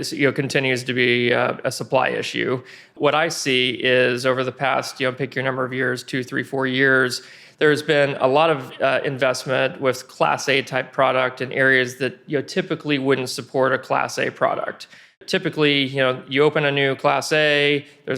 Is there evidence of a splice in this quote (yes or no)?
yes